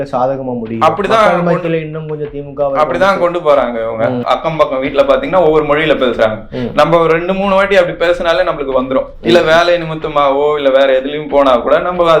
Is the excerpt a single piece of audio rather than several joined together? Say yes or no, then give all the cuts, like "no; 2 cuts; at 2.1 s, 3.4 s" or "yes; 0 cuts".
no; 1 cut; at 4.2 s